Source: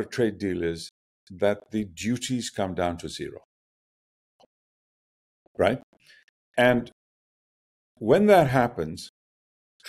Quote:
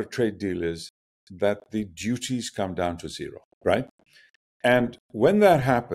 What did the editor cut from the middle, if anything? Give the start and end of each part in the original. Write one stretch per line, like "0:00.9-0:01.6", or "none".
0:03.5-0:05.4
0:07.0-0:07.9